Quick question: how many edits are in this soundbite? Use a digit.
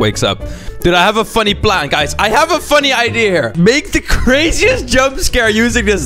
1